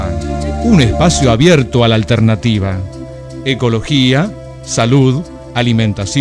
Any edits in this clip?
no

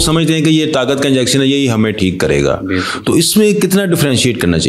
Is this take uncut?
yes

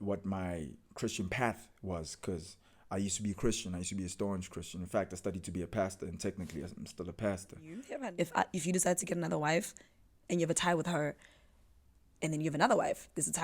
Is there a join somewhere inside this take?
yes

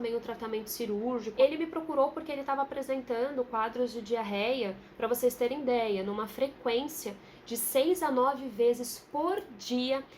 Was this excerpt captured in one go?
no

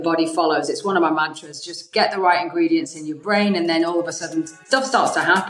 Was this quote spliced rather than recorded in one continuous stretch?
yes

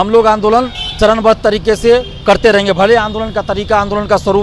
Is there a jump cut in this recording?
no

